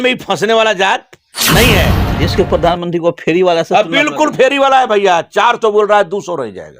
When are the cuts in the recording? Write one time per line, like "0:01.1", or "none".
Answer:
0:02.1

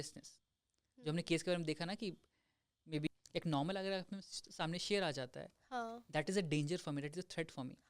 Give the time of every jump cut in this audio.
0:03.1

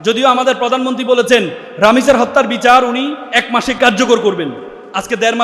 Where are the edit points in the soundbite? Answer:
0:01.6
0:03.8

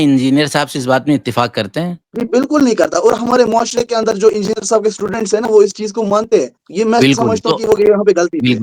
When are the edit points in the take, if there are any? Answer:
none

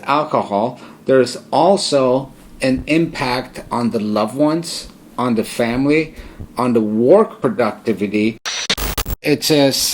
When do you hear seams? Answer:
0:08.7

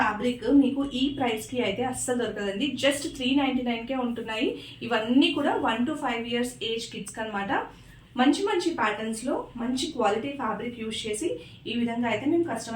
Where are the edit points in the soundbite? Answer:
none

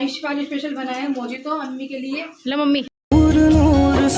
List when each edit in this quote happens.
0:03.1

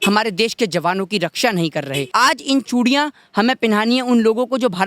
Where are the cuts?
0:02.1

